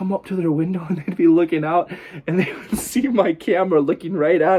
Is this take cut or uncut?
uncut